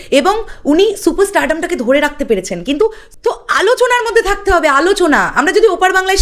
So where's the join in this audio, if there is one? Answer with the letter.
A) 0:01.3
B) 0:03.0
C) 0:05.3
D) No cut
B